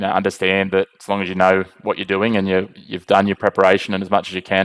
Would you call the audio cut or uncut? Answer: uncut